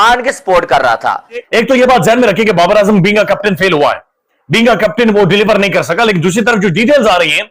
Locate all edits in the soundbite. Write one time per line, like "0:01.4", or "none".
0:01.5